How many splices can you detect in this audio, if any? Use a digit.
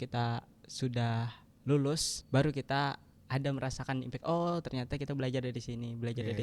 3